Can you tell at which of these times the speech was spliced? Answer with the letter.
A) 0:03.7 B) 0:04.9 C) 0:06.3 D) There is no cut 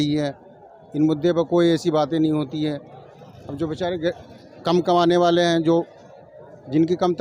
D